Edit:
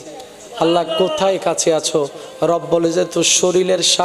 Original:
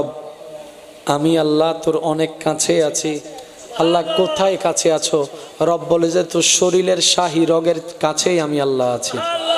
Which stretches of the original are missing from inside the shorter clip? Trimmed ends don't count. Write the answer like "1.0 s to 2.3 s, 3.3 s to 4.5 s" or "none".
none

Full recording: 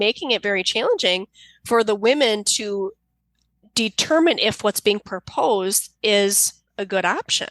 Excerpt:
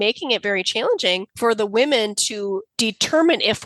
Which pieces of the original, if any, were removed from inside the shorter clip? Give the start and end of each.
1.3 s to 1.6 s, 3.0 s to 3.7 s

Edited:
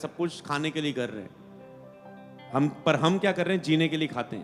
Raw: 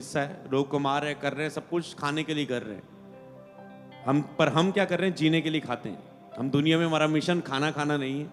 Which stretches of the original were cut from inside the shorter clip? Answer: none

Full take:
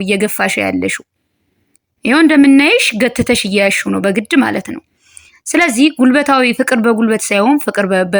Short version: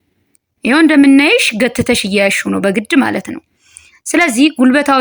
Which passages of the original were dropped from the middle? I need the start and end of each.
none

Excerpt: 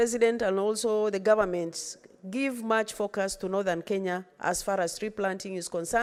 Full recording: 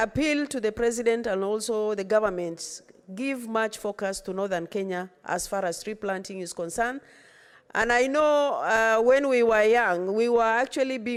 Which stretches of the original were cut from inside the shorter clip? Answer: none

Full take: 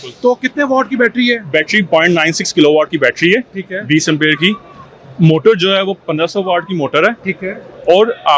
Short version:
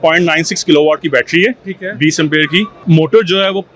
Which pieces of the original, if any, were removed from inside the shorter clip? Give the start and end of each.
4.6 s to 5.1 s

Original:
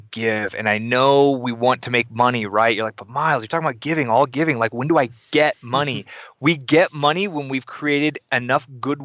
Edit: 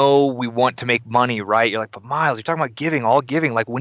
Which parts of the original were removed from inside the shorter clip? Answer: none

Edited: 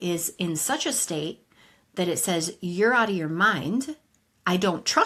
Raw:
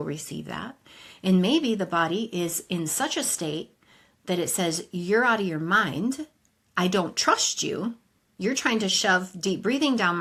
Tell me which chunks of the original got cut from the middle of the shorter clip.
none

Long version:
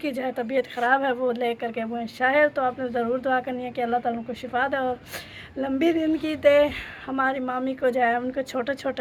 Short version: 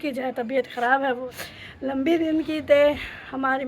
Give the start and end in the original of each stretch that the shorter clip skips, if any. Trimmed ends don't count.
1.2 s to 5.0 s

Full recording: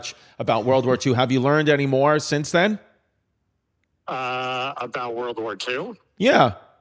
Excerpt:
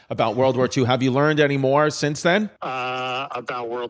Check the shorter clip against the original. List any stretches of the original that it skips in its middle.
2.9 s to 4.0 s

